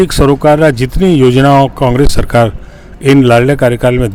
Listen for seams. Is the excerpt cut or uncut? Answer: uncut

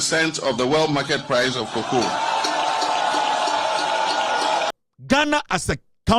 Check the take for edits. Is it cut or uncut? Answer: cut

